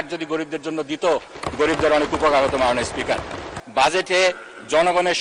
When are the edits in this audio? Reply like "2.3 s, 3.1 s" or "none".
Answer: 3.5 s